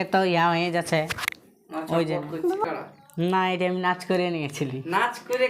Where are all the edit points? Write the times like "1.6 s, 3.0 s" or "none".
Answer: 2.6 s